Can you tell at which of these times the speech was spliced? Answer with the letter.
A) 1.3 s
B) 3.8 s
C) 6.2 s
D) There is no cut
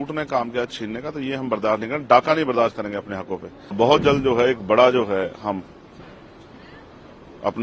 B